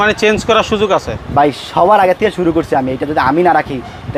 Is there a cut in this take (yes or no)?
no